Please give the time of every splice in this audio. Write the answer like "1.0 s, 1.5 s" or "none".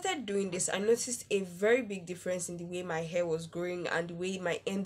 none